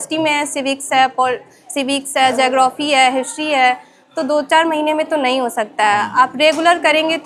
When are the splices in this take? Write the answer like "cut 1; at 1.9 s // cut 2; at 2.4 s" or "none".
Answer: none